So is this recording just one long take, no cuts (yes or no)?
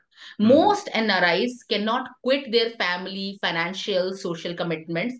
yes